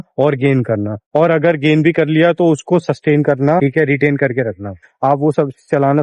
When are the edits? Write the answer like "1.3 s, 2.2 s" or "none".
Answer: 4.7 s